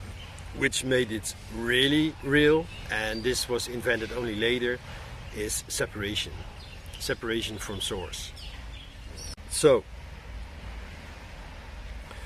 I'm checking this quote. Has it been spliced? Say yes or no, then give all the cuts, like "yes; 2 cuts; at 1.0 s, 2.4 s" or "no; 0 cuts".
yes; 1 cut; at 9.4 s